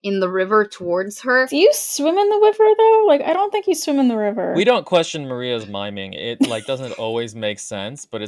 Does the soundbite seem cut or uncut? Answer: cut